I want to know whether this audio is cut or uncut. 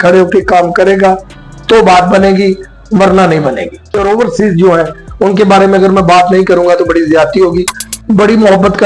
cut